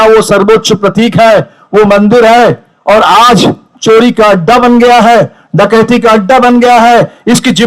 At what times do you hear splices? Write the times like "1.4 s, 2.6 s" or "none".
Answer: none